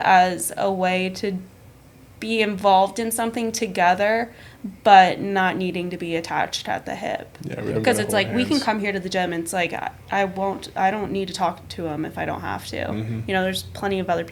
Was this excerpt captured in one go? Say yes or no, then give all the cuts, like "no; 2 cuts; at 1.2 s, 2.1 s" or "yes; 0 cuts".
yes; 0 cuts